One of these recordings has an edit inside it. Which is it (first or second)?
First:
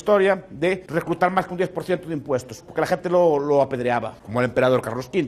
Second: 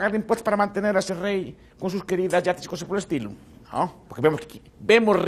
first